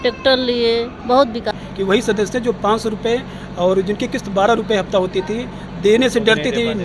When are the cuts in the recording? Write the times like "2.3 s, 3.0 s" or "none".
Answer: 1.5 s